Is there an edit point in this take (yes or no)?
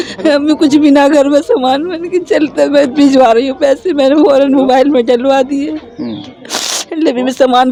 no